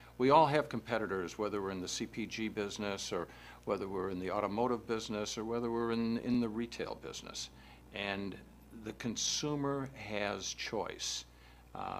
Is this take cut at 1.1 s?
no; 1 cut; at 3.2 s

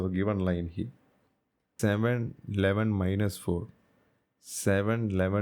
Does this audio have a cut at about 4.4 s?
no; 1 cut; at 1.6 s

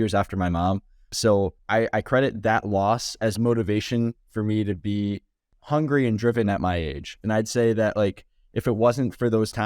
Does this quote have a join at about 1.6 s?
yes; 1 cut; at 1.6 s

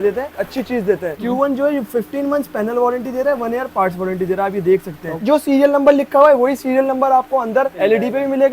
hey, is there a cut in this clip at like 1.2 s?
yes; 2 cuts; at 1.2 s, 5.2 s

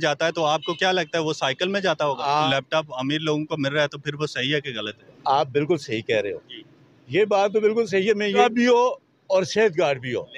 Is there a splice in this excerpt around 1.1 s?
no; 3 cuts; at 2.5 s, 5.1 s, 8.4 s

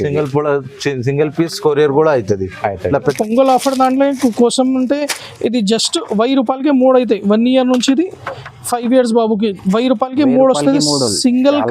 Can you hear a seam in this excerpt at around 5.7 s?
no; 1 cut; at 3.1 s

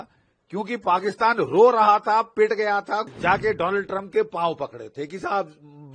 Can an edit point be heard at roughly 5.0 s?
no; 1 cut; at 3.1 s

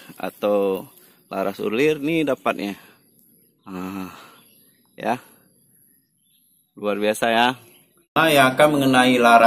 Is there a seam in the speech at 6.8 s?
no; 1 cut; at 8.1 s

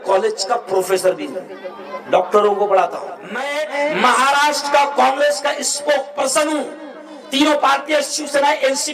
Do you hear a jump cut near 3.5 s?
yes; 1 cut; at 3.5 s

